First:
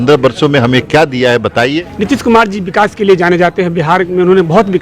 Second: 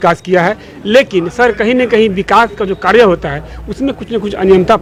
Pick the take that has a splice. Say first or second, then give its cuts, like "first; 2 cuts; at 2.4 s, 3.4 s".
first; 1 cut; at 1.9 s